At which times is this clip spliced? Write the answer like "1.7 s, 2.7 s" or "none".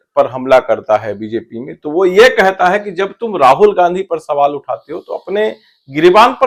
none